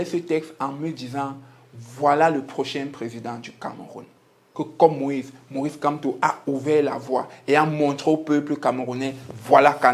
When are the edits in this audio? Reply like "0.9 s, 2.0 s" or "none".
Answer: 4.4 s